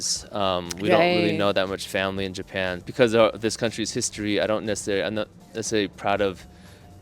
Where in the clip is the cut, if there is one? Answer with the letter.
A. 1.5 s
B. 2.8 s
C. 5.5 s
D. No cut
B